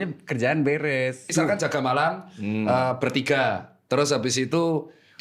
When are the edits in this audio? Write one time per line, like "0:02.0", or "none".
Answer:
0:01.3